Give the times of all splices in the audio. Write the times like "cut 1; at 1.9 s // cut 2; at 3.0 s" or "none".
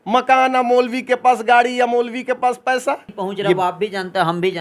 cut 1; at 3.6 s